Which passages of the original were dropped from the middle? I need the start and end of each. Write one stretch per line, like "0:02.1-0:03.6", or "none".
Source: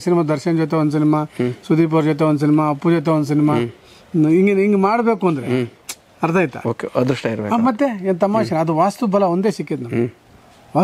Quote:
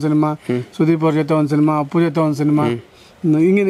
none